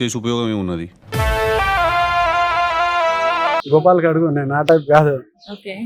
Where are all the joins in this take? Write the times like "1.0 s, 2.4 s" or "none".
3.6 s